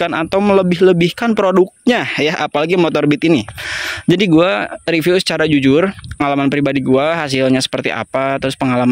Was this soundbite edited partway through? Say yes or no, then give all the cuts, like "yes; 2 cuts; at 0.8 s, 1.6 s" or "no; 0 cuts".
yes; 1 cut; at 6.2 s